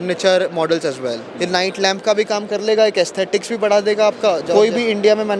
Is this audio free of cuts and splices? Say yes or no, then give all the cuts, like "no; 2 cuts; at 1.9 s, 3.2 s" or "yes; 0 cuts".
no; 2 cuts; at 1.3 s, 4.5 s